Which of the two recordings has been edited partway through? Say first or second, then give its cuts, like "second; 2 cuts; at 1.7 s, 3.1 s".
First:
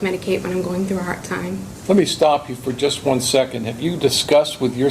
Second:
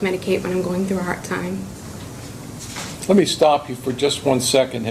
first; 1 cut; at 1.7 s